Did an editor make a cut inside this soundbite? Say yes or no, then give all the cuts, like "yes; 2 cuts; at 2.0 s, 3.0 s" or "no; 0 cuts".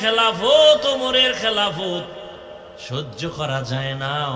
no; 0 cuts